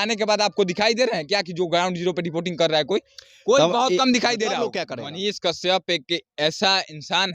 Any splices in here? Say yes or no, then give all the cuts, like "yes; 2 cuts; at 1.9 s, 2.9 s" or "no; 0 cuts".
yes; 1 cut; at 4.8 s